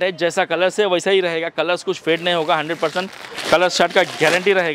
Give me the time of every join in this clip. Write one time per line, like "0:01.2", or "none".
none